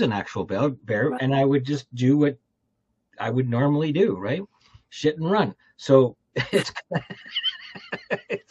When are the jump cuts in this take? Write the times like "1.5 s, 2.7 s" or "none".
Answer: none